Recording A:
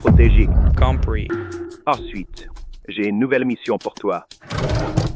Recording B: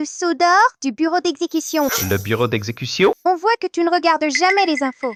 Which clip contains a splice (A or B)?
A